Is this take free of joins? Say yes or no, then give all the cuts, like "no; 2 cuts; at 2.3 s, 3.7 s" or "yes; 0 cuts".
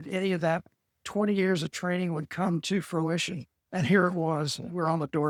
yes; 0 cuts